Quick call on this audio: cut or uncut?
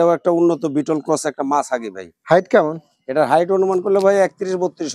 uncut